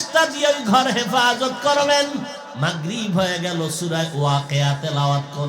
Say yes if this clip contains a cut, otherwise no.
yes